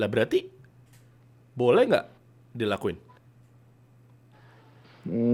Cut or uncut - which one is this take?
uncut